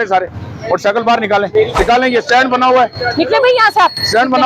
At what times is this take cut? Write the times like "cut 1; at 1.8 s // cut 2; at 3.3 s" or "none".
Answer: cut 1; at 1.8 s